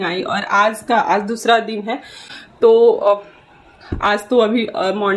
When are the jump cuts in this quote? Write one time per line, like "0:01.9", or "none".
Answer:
none